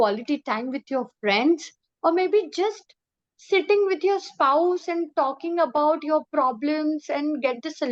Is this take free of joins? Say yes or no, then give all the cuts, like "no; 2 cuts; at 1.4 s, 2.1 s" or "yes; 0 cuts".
yes; 0 cuts